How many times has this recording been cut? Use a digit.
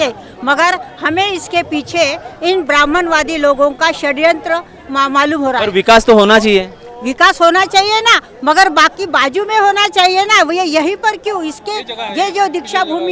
0